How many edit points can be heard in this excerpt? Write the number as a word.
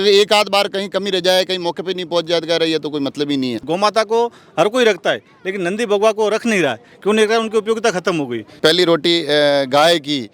two